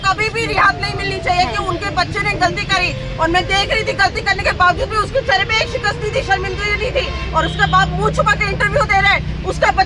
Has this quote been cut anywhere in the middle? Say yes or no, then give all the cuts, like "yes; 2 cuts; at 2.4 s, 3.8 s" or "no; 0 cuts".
no; 0 cuts